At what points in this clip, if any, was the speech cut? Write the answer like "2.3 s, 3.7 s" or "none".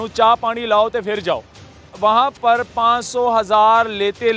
1.8 s